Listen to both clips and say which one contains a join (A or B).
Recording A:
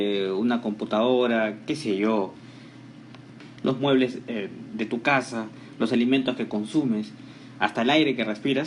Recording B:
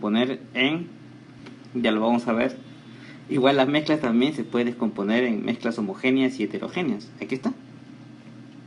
A